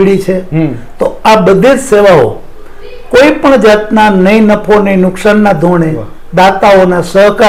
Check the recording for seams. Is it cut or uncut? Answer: uncut